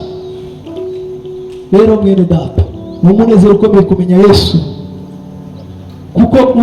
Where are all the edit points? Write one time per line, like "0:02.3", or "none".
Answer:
none